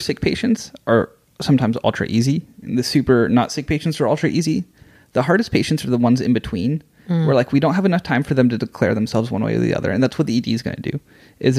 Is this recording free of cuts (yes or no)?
yes